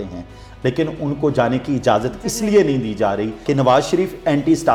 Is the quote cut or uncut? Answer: uncut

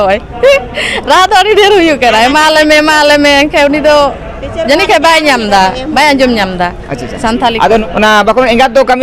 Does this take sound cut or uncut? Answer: cut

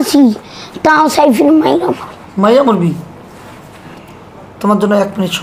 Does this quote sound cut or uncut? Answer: cut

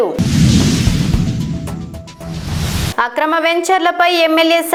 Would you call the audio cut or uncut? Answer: uncut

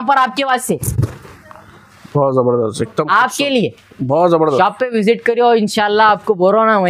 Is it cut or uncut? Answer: uncut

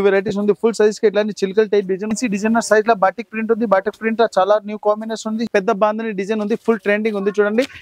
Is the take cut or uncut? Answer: cut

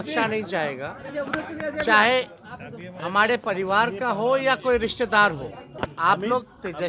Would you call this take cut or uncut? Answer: cut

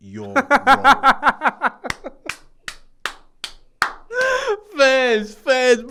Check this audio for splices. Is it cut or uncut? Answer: uncut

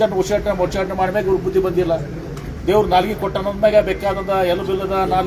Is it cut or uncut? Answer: uncut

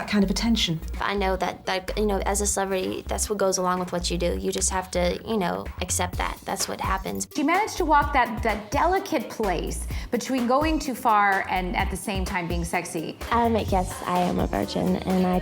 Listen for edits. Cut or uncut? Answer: cut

